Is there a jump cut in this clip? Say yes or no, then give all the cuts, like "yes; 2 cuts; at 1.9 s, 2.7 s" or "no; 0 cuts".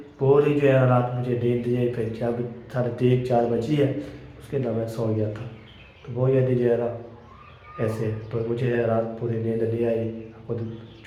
no; 0 cuts